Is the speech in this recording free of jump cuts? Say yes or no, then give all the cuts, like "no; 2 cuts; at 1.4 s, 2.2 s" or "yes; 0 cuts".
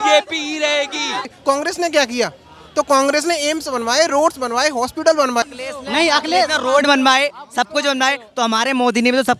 no; 2 cuts; at 1.3 s, 5.5 s